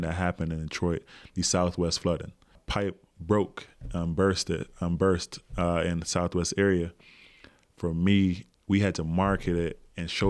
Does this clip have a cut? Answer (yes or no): yes